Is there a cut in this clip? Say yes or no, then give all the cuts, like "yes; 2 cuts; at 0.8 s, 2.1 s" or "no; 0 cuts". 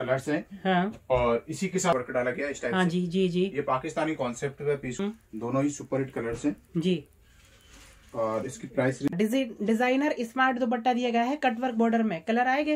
yes; 3 cuts; at 1.9 s, 5.0 s, 9.1 s